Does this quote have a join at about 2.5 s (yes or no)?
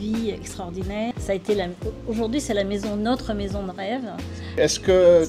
no